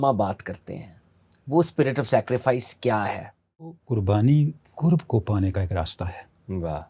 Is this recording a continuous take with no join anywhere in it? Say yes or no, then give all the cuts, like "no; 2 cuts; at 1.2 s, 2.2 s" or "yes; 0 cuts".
no; 1 cut; at 3.8 s